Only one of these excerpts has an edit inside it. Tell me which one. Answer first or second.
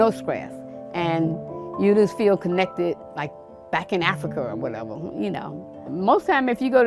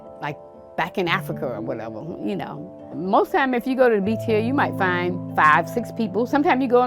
second